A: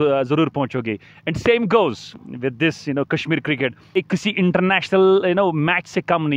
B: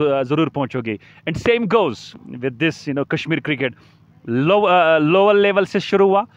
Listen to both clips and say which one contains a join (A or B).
A